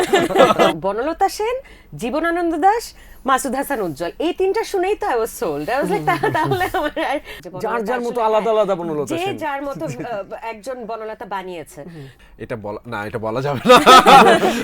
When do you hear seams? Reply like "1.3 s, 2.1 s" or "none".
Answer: 0.8 s, 7.4 s, 12.2 s